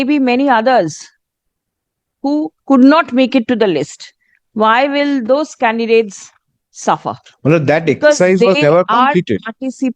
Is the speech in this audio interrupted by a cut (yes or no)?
no